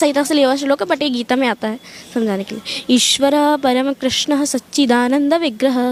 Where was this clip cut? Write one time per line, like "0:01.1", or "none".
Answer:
none